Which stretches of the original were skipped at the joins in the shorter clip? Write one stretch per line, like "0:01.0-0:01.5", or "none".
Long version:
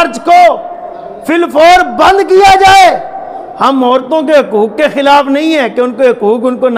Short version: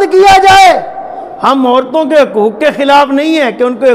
none